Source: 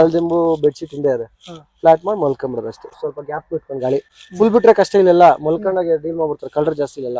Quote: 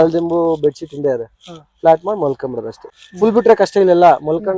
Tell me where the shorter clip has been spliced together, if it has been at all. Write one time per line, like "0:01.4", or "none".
0:03.0